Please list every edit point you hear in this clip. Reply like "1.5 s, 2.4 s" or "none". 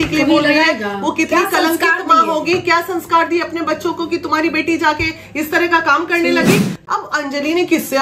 6.7 s